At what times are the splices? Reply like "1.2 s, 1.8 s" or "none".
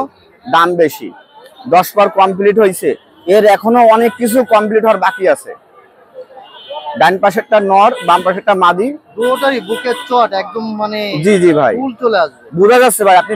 none